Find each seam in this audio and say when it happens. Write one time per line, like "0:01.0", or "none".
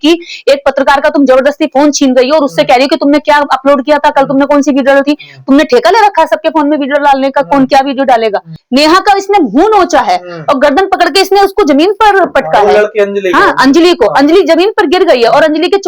0:08.6